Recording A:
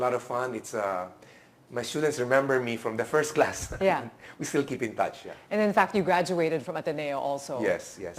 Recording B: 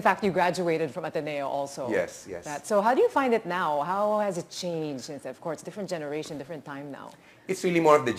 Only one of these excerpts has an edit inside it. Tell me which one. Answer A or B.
A